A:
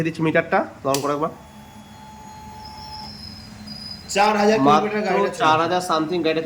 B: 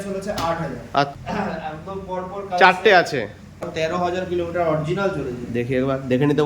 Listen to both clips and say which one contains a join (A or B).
B